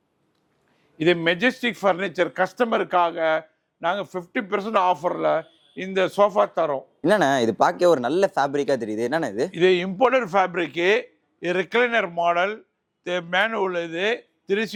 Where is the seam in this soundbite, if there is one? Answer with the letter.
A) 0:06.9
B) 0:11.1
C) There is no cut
C